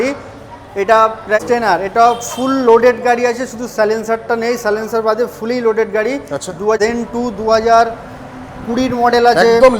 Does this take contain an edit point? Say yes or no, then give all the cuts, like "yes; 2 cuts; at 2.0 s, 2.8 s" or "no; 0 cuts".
yes; 2 cuts; at 1.4 s, 6.8 s